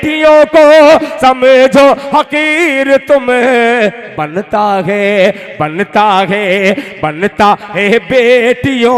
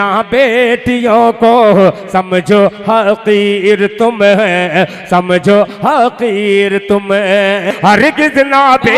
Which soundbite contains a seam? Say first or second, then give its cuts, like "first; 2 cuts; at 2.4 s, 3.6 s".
second; 1 cut; at 7.7 s